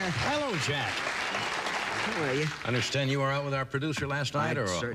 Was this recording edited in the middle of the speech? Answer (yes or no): yes